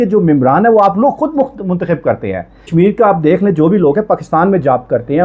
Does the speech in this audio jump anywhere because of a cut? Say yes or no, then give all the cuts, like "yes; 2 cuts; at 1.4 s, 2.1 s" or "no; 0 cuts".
yes; 1 cut; at 2.7 s